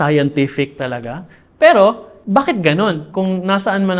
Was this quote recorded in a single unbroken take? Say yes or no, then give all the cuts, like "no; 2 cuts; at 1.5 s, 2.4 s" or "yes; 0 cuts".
no; 2 cuts; at 2.1 s, 3.1 s